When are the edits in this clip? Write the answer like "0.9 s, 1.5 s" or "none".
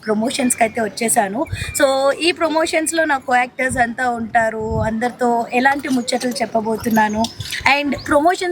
none